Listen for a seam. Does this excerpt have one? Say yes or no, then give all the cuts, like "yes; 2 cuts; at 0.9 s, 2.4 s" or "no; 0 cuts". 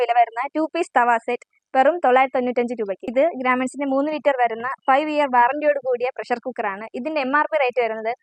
yes; 1 cut; at 3.0 s